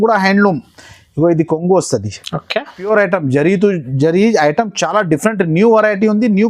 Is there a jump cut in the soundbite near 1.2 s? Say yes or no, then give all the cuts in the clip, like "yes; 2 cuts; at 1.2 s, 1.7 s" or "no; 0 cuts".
no; 1 cut; at 2.7 s